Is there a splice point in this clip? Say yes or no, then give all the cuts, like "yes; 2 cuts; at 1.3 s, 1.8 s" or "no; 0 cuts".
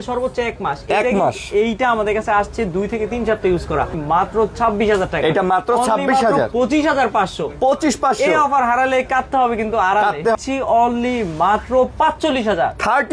yes; 2 cuts; at 3.9 s, 10.4 s